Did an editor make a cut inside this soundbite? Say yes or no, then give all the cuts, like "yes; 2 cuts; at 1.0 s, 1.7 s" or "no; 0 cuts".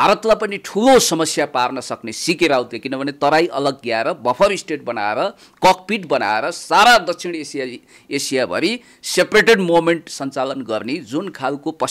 no; 0 cuts